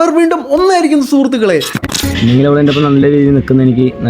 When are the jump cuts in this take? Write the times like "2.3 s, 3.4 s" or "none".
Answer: 1.8 s

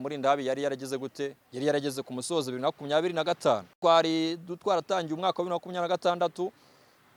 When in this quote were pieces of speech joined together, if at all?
none

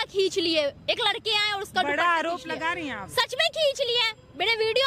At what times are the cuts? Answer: none

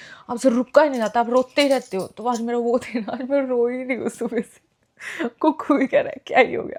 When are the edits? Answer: none

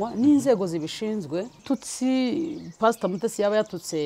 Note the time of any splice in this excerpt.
1.6 s

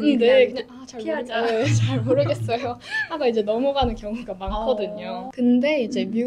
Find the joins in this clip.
5.3 s

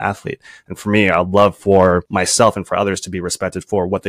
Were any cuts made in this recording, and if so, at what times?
2.1 s

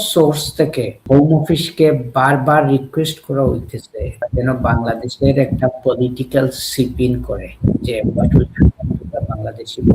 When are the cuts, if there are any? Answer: 1.0 s, 4.3 s, 7.5 s

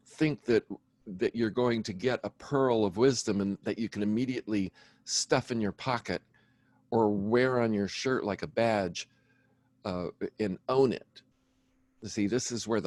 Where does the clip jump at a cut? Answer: none

